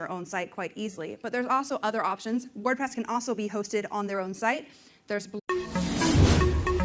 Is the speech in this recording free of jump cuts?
yes; 0 cuts

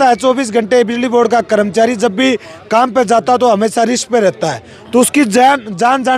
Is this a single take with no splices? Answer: yes; 0 cuts

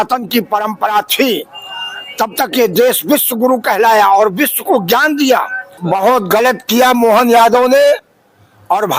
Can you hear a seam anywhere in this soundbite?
yes; 1 cut; at 5.8 s

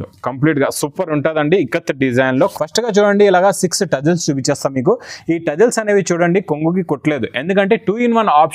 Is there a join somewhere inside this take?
yes; 1 cut; at 2.4 s

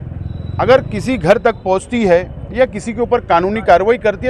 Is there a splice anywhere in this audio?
no; 0 cuts

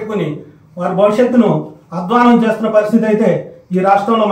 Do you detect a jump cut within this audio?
yes; 1 cut; at 1.4 s

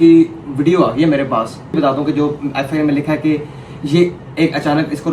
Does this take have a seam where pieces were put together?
yes; 1 cut; at 1.8 s

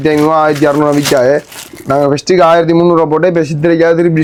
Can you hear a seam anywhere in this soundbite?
no; 0 cuts

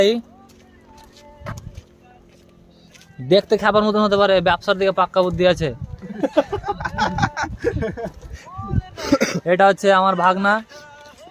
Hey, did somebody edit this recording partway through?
yes; 1 cut; at 9.0 s

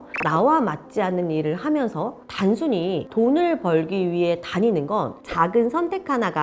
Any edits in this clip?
yes; 1 cut; at 5.2 s

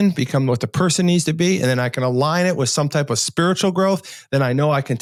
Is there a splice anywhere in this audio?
no; 0 cuts

